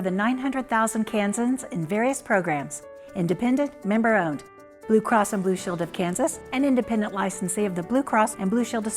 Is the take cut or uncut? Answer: uncut